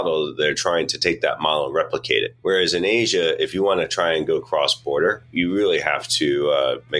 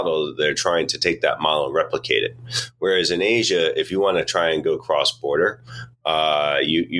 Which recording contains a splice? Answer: first; 2 cuts; at 2.3 s, 5.3 s

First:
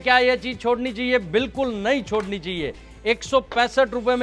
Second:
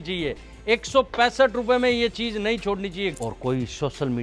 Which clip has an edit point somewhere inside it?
second; 1 cut; at 3.1 s

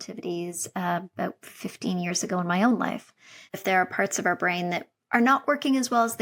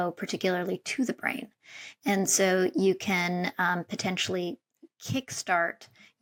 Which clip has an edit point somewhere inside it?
first; 1 cut; at 3.6 s

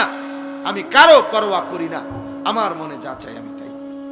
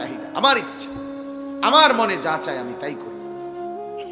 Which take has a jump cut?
first; 1 cut; at 3.2 s

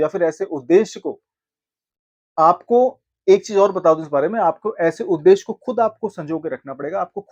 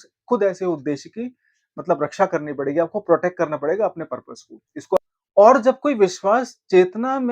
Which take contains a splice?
second; 1 cut; at 5.0 s

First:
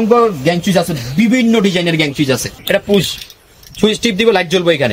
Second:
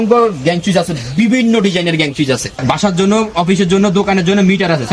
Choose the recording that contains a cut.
second; 1 cut; at 2.5 s

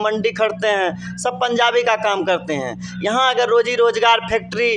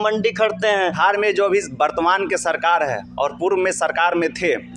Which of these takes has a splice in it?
second; 1 cut; at 1.0 s

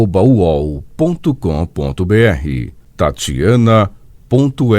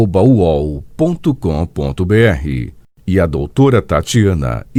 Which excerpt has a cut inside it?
first; 1 cut; at 2.3 s

